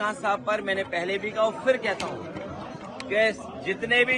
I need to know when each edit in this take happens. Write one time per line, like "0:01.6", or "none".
none

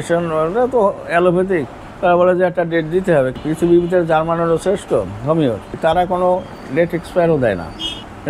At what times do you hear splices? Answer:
0:03.4
0:05.7

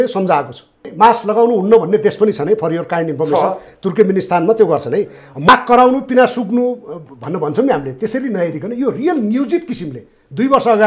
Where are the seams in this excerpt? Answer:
0:00.9
0:05.5

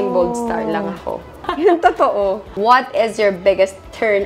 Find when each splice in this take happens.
0:01.5
0:02.5

